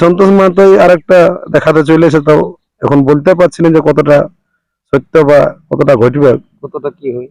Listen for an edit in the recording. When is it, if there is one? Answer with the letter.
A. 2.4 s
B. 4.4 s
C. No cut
C